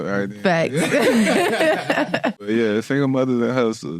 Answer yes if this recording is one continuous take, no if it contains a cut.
no